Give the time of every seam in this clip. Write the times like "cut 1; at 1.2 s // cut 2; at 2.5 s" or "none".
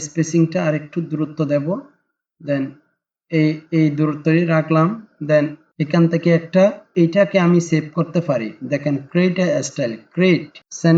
cut 1; at 6.8 s